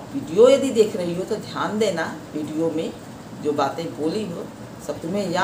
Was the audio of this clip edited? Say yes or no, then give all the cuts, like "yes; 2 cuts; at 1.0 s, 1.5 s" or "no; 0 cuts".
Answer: no; 0 cuts